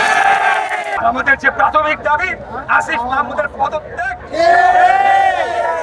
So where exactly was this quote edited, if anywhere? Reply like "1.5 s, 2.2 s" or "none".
0.9 s